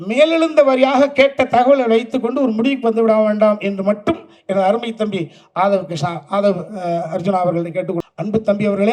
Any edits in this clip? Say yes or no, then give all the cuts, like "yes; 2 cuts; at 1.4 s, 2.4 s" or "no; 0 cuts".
yes; 1 cut; at 8.0 s